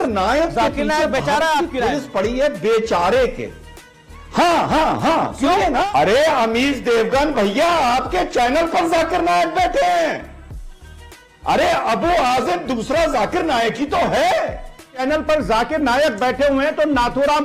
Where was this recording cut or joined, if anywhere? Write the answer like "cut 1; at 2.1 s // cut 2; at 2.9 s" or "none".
cut 1; at 5.9 s // cut 2; at 15.0 s